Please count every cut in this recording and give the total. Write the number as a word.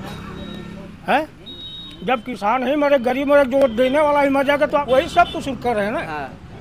one